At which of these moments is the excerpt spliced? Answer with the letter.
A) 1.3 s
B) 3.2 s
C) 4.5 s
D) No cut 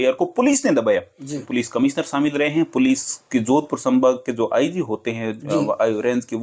A